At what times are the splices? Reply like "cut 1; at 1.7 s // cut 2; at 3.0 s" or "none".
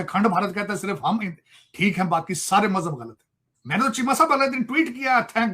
none